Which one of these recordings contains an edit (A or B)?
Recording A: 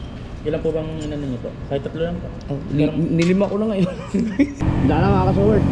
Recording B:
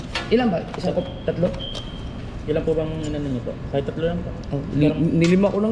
A